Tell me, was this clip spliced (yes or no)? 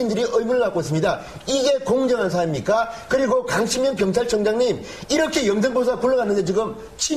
yes